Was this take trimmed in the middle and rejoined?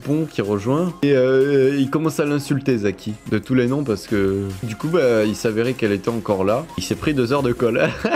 yes; 2 cuts; at 1.0 s, 4.6 s

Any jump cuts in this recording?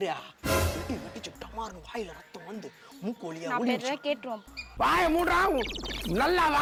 no; 0 cuts

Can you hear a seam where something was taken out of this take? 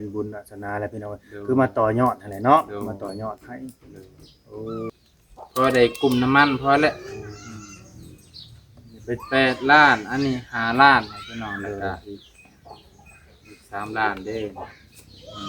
yes; 1 cut; at 4.9 s

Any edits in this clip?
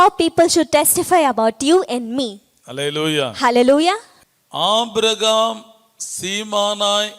yes; 1 cut; at 4.1 s

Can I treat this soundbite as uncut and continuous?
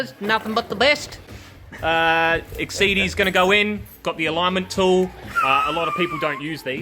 yes; 0 cuts

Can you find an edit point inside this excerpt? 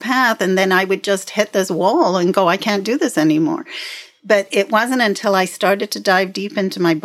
no; 0 cuts

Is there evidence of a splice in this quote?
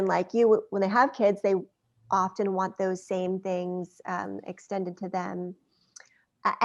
no; 0 cuts

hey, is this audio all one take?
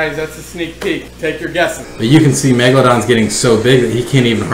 no; 1 cut; at 1.7 s

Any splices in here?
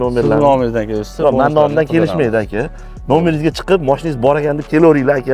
no; 0 cuts

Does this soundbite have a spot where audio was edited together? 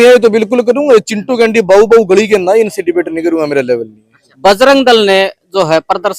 yes; 1 cut; at 4.2 s

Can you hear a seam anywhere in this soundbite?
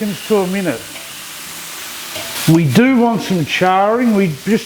no; 0 cuts

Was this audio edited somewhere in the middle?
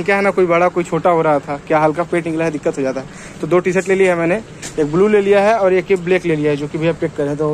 no; 0 cuts

